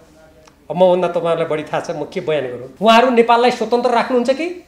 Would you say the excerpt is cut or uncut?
cut